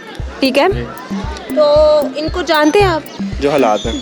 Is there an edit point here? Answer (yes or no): yes